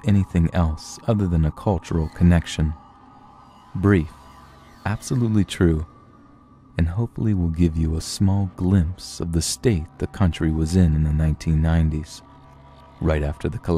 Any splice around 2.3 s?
yes; 1 cut; at 2.3 s

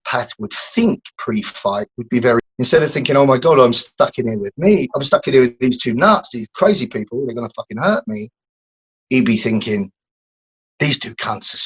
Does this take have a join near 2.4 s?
yes; 1 cut; at 2.4 s

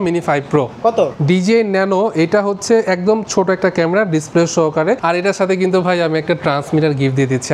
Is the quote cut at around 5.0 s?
yes; 2 cuts; at 1.2 s, 5.0 s

